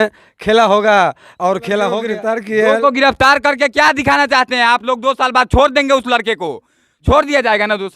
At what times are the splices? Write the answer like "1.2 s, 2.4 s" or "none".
2.1 s